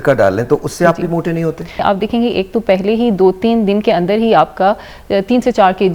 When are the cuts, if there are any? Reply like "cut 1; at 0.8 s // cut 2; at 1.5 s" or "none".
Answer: cut 1; at 1.8 s